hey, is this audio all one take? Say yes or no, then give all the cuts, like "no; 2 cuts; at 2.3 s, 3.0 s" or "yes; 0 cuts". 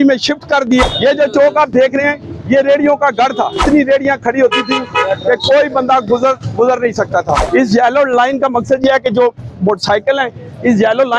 no; 3 cuts; at 0.8 s, 3.6 s, 7.4 s